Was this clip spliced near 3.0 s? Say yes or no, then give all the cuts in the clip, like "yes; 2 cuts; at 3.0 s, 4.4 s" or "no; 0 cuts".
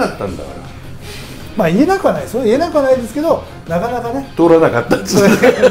no; 0 cuts